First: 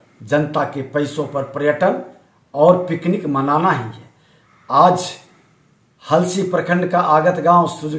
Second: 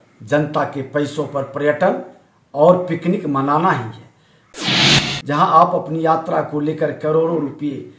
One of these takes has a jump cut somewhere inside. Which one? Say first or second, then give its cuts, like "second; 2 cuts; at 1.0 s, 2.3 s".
second; 1 cut; at 4.7 s